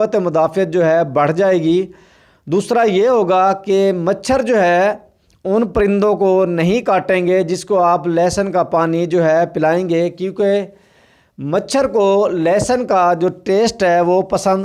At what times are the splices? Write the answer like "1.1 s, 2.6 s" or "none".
none